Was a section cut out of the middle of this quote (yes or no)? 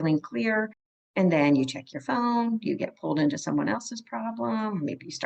no